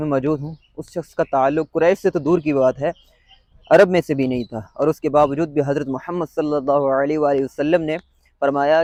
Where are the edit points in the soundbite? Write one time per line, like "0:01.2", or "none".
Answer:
none